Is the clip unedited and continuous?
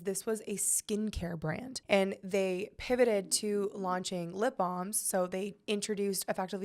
no; 1 cut; at 1.7 s

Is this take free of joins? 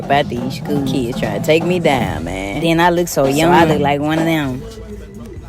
no; 1 cut; at 2.7 s

